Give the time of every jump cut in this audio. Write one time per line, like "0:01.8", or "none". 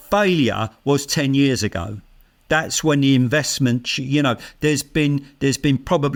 none